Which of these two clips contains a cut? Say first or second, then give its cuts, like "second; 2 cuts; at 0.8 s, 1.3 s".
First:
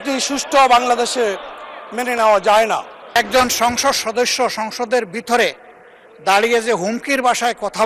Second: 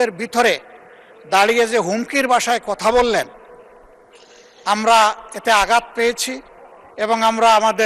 first; 1 cut; at 3.2 s